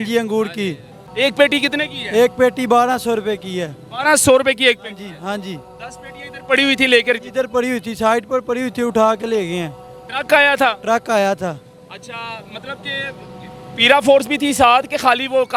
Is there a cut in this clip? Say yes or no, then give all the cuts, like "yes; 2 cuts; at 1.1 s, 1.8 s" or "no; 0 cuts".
no; 0 cuts